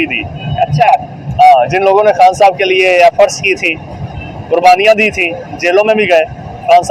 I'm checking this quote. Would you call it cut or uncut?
uncut